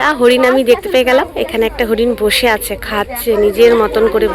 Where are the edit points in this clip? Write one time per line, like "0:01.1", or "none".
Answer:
none